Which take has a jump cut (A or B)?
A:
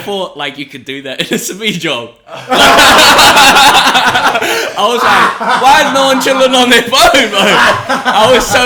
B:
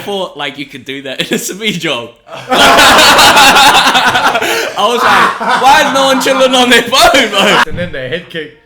B